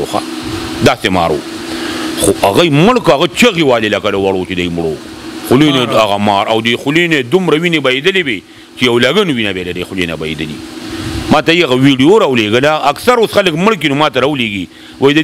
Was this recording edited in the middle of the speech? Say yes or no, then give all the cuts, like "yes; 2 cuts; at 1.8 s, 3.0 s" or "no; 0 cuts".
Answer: no; 0 cuts